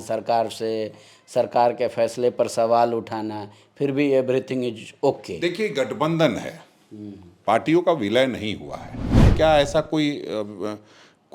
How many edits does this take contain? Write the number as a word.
one